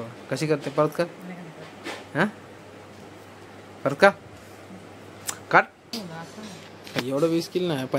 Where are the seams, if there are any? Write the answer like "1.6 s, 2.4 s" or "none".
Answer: 5.9 s

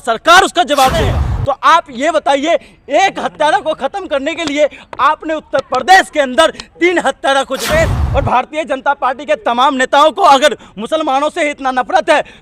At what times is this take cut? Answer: 1.3 s, 7.6 s

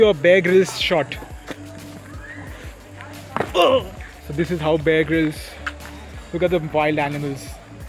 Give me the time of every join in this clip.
none

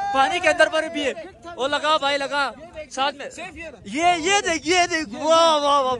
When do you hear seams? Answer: none

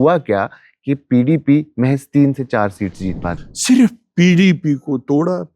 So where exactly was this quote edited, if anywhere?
3.3 s

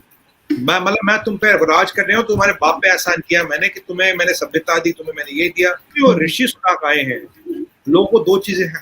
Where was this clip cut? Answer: 5.8 s

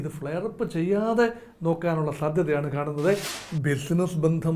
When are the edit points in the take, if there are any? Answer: 3.3 s

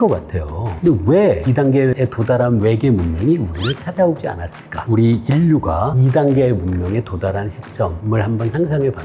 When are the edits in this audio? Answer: 4.8 s

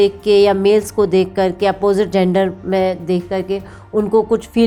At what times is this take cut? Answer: none

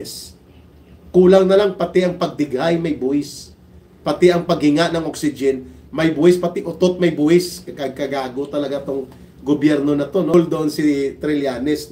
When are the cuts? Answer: 10.3 s

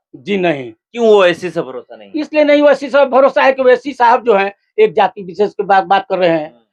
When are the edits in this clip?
none

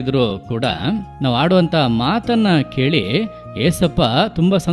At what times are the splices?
1.1 s

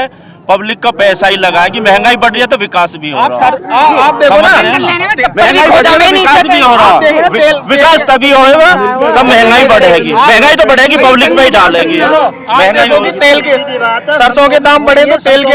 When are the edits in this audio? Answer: none

